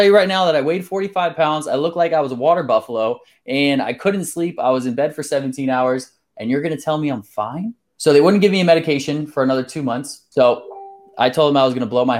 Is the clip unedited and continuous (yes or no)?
no